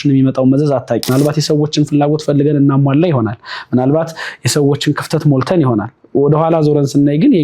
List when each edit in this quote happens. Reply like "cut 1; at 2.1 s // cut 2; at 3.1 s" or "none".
cut 1; at 1.1 s

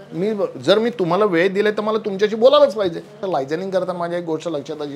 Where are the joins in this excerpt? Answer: cut 1; at 3.1 s

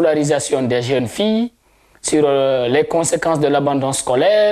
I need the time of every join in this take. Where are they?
none

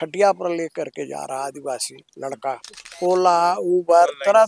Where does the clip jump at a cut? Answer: cut 1; at 2.9 s

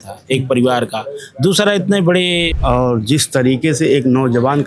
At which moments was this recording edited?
cut 1; at 2.5 s

